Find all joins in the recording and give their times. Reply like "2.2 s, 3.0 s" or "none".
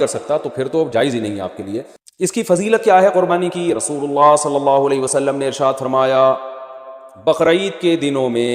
2.0 s